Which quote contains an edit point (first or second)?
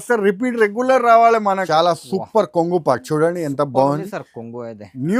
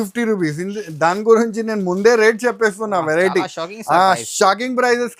first